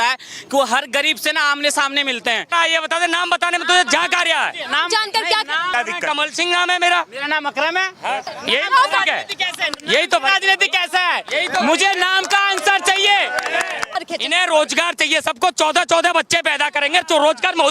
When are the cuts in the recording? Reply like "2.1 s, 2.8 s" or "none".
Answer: 2.5 s, 5.7 s, 8.3 s, 14.0 s